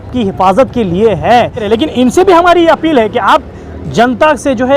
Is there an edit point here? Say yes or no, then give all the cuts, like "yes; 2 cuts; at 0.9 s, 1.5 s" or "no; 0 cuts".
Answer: yes; 1 cut; at 1.7 s